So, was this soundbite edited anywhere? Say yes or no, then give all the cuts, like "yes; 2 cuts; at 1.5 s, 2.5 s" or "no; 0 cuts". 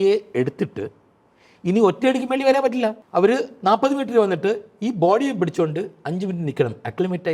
yes; 1 cut; at 3.0 s